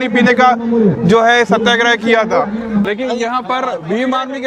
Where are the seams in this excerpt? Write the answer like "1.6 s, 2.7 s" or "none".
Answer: 2.8 s